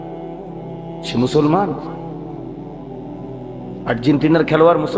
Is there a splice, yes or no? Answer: yes